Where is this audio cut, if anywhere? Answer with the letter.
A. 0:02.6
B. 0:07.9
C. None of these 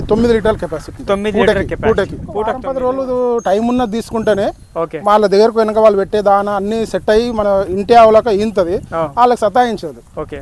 A